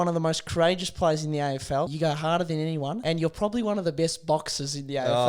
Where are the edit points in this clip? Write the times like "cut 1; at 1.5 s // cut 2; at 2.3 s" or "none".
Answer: cut 1; at 1.9 s // cut 2; at 3.0 s